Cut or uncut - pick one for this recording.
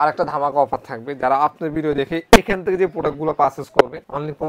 uncut